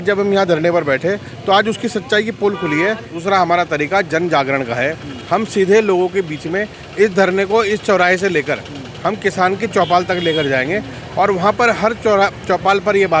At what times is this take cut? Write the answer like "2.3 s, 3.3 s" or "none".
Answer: 3.2 s